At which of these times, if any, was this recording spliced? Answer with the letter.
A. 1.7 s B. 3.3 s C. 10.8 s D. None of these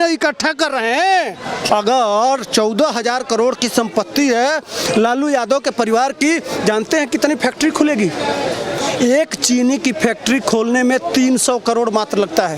A